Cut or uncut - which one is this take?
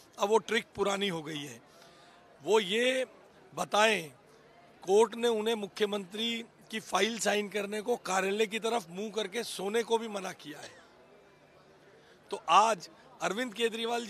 uncut